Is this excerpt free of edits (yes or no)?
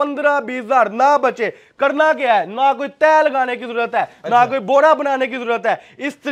yes